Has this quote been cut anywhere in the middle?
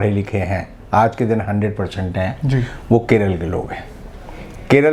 no; 0 cuts

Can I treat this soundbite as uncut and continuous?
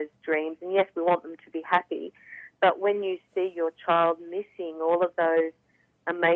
yes; 0 cuts

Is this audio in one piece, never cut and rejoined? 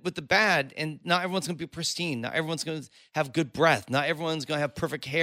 yes; 0 cuts

